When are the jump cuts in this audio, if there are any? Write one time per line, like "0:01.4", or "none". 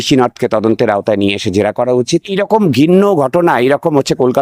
0:02.3